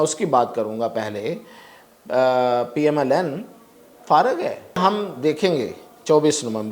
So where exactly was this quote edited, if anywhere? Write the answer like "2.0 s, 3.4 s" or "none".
4.8 s